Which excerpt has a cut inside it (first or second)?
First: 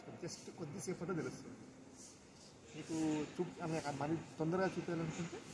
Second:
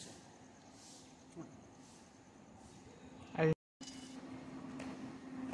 second